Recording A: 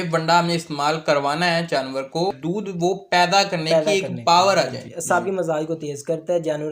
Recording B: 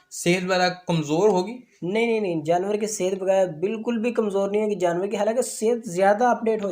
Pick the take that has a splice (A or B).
A